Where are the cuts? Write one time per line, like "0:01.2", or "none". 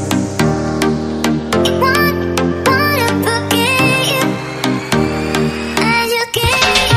none

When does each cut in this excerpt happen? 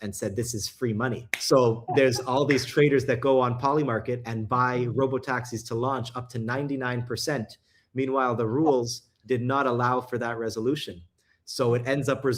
0:01.3

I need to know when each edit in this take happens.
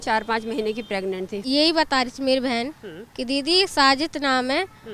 0:01.4

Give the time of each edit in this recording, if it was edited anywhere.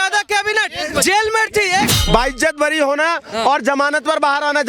0:01.9

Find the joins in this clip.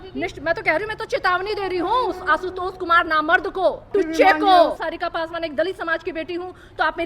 0:03.9
0:04.8

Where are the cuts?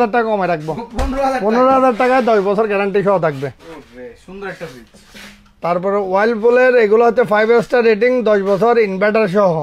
none

